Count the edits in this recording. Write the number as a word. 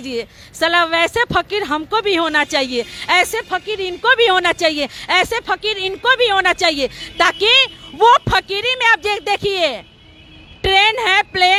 zero